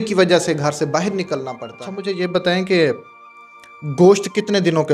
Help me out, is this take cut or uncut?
cut